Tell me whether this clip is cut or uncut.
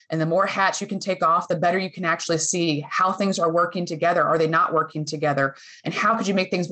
uncut